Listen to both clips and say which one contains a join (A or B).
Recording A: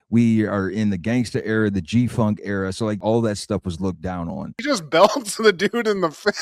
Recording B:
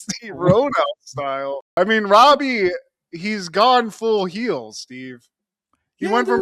A